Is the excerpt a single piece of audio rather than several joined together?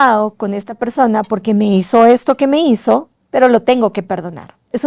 no; 1 cut; at 3.2 s

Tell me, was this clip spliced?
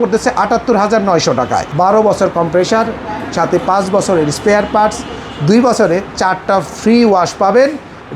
yes; 1 cut; at 1.7 s

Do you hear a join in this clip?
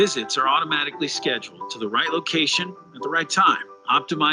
yes; 1 cut; at 2.3 s

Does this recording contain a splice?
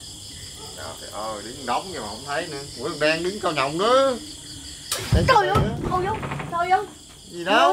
no; 0 cuts

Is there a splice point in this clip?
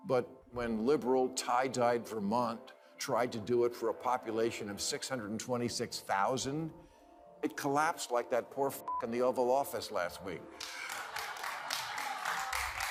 no; 0 cuts

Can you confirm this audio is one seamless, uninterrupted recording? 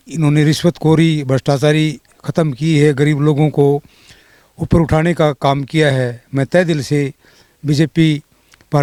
yes; 0 cuts

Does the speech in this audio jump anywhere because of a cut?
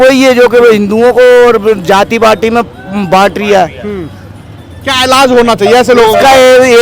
no; 0 cuts

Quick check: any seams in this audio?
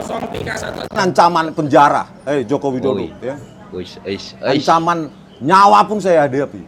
yes; 1 cut; at 1.0 s

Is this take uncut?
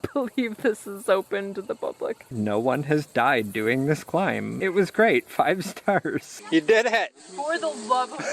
no; 3 cuts; at 2.3 s, 4.5 s, 6.3 s

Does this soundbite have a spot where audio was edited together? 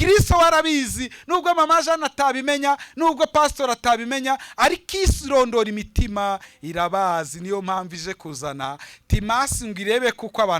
no; 0 cuts

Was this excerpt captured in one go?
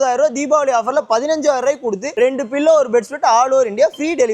yes; 0 cuts

